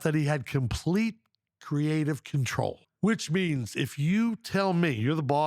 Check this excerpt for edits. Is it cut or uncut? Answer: cut